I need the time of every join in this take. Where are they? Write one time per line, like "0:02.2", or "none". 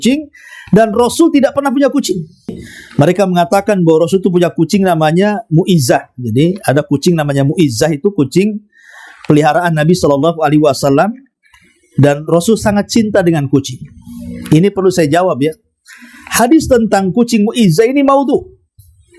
0:02.6